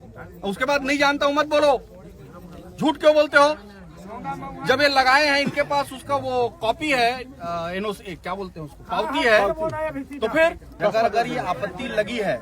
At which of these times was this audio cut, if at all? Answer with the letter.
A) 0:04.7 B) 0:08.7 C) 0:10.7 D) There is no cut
C